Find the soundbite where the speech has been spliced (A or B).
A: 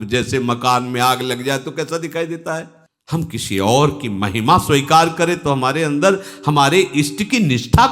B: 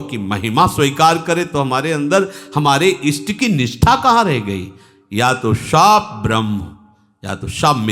A